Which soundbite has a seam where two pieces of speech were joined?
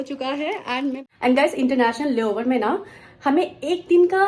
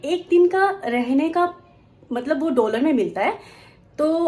first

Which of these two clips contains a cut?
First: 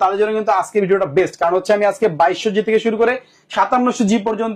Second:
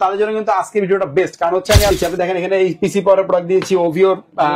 second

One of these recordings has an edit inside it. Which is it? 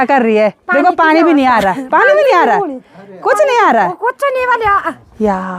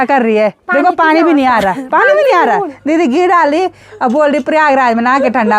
second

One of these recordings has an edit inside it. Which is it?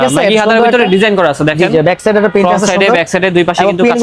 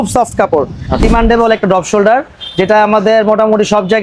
second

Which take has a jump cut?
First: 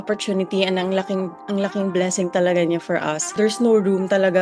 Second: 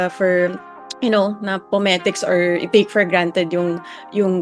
first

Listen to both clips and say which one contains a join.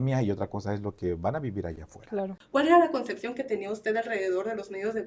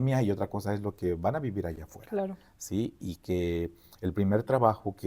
first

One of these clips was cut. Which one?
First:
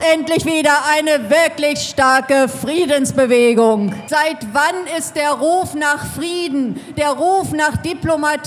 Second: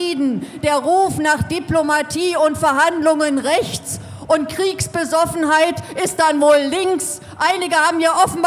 first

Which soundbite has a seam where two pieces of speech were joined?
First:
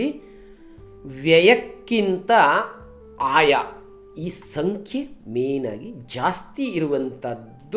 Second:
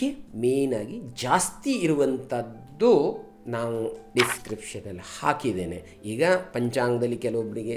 second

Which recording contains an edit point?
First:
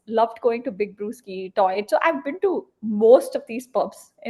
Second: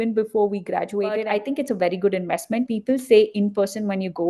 second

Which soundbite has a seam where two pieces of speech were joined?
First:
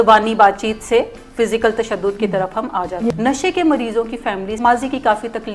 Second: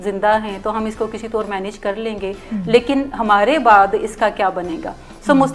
first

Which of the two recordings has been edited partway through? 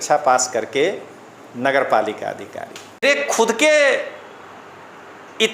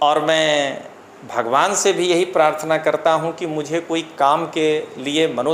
first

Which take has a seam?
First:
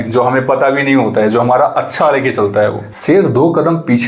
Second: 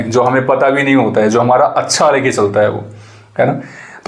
first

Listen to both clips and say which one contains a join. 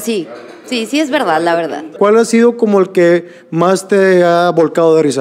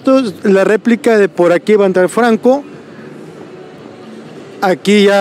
first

